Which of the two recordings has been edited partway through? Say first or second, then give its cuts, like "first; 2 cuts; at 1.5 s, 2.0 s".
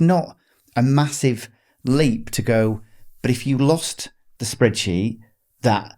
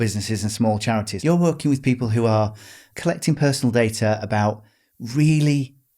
second; 2 cuts; at 1.1 s, 2.8 s